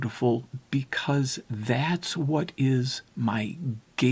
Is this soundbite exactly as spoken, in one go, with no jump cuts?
yes; 0 cuts

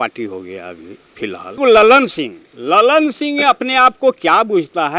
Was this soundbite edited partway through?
yes; 1 cut; at 1.6 s

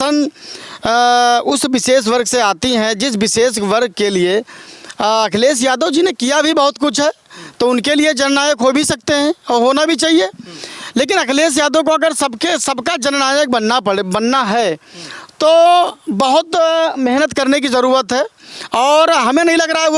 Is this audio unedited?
yes; 0 cuts

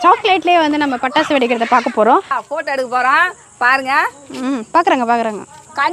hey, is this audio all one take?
no; 1 cut; at 2.4 s

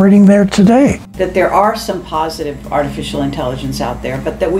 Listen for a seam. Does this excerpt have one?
yes; 1 cut; at 1.0 s

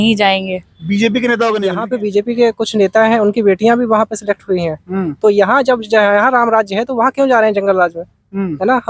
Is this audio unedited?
no; 1 cut; at 1.9 s

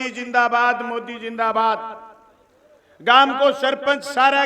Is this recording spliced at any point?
no; 0 cuts

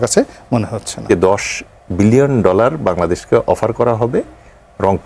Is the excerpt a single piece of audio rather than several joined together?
no; 1 cut; at 1.1 s

